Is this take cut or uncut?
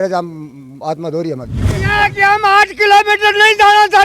cut